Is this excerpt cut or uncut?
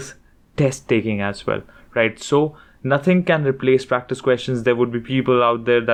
uncut